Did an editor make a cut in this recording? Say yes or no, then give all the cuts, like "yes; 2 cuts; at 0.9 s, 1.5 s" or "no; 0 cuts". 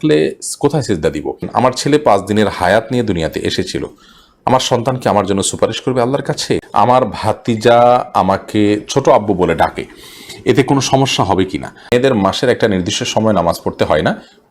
yes; 3 cuts; at 1.5 s, 6.6 s, 11.9 s